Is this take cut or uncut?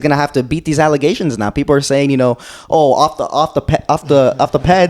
uncut